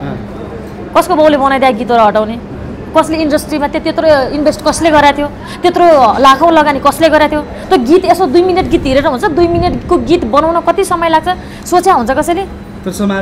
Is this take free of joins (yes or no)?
yes